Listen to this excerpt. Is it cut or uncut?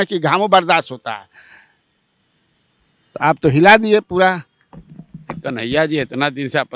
uncut